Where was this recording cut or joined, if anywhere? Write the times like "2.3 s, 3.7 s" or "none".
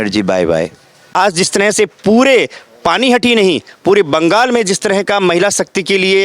1.0 s

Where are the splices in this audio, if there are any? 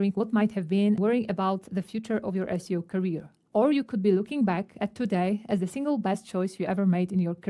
6.6 s

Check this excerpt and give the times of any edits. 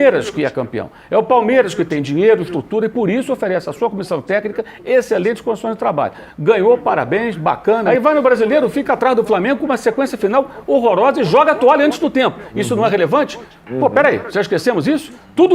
7.8 s

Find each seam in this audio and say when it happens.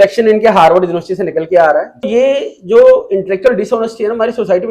2.1 s

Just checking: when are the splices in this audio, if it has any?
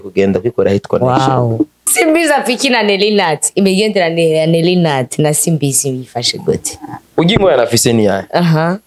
1.8 s, 6.9 s

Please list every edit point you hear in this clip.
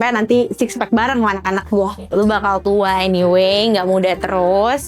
2.0 s

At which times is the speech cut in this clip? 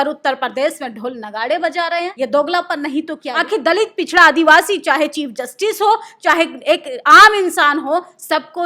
2.1 s, 3.2 s

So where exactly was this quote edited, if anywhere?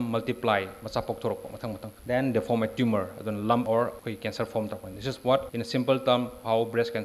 1.9 s, 3.8 s, 5.5 s

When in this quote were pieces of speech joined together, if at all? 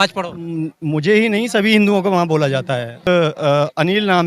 3.1 s

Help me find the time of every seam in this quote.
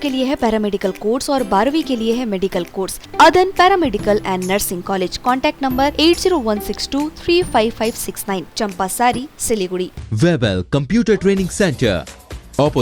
3.0 s, 10.0 s

